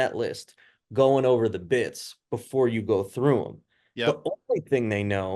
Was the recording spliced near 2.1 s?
no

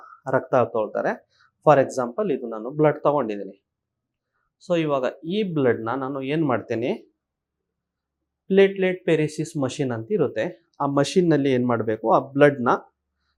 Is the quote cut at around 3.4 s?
no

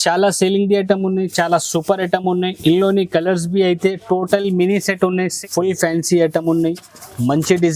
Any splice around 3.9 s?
no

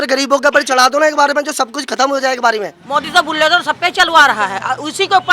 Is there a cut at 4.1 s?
no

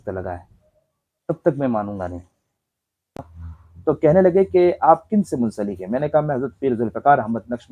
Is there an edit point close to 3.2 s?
yes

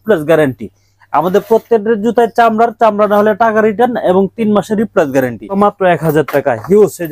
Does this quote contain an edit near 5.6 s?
yes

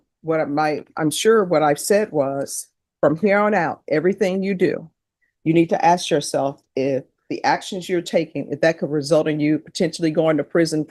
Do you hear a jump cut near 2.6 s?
no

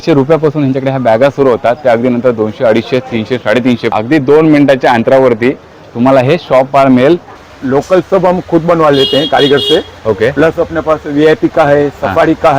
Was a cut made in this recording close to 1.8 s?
no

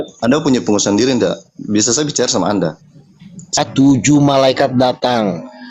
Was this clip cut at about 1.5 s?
no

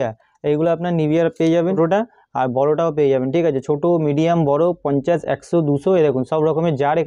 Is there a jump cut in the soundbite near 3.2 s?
no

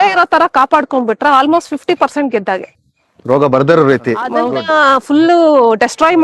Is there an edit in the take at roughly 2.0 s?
no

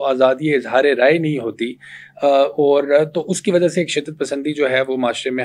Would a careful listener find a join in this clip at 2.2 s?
no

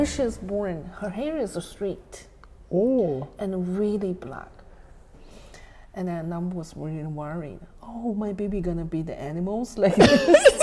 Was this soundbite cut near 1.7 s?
no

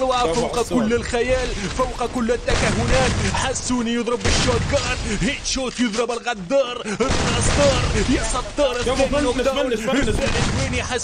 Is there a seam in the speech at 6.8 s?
no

